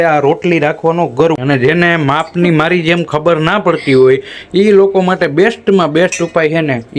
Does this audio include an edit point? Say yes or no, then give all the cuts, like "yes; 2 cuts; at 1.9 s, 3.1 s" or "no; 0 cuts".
yes; 1 cut; at 1.4 s